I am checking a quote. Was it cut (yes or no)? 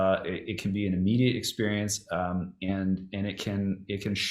no